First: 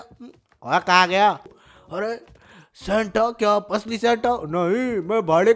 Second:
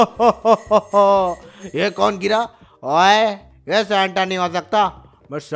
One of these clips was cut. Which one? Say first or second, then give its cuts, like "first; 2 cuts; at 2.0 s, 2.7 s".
first; 1 cut; at 1.5 s